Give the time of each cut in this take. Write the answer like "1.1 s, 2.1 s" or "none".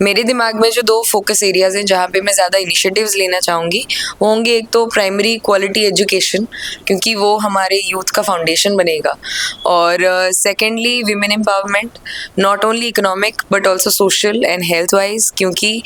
none